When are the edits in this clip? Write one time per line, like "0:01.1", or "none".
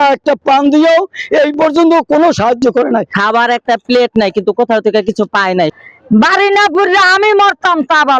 0:03.1
0:05.7